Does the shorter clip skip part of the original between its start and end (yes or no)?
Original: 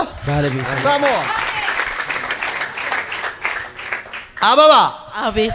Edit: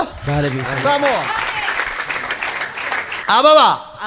yes